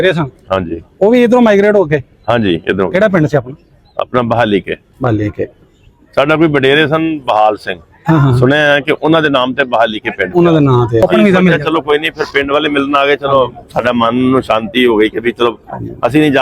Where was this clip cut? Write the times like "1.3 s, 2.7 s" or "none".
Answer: 11.0 s